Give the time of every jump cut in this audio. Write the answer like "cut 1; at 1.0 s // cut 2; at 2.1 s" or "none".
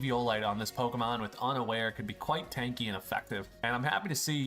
cut 1; at 3.5 s